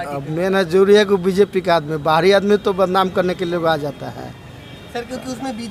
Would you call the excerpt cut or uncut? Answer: uncut